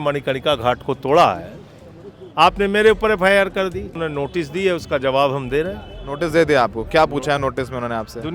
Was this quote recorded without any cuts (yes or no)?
no